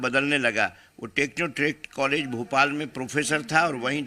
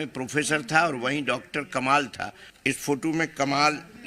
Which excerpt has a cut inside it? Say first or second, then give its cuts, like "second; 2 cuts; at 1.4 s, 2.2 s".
second; 1 cut; at 2.5 s